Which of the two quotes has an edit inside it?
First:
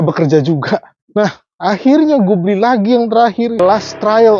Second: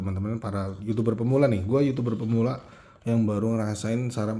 first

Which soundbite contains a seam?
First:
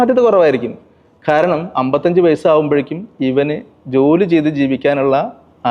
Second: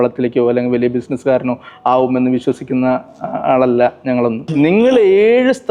second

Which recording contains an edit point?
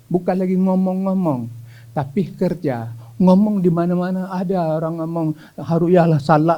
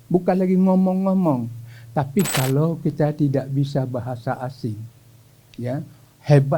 second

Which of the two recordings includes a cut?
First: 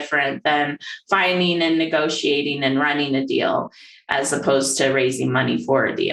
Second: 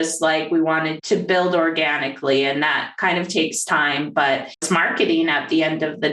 second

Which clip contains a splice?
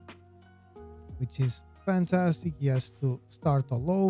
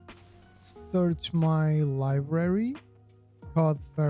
first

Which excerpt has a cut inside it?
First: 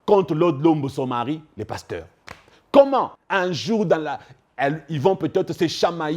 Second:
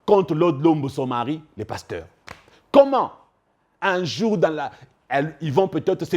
first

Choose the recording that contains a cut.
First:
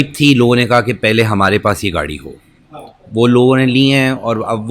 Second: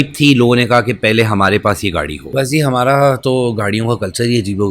second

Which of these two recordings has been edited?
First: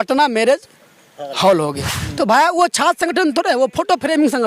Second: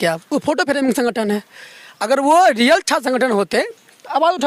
first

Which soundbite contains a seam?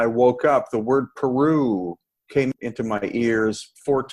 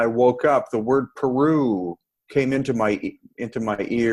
first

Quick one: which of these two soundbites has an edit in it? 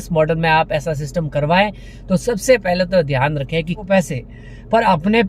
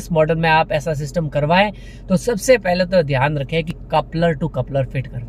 first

